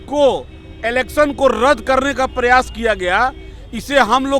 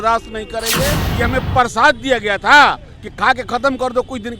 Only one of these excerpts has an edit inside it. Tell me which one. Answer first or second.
second